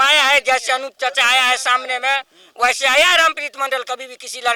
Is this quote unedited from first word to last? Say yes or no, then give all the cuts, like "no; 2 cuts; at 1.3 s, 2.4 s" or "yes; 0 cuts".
yes; 0 cuts